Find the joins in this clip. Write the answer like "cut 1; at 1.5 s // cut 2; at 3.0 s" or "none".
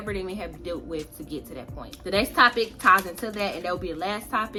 none